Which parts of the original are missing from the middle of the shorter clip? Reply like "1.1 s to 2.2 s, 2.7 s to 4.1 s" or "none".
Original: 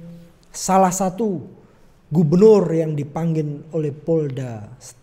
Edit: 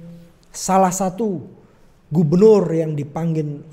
none